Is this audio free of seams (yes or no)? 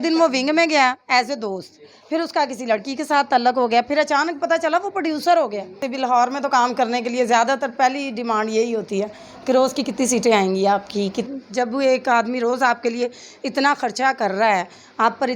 no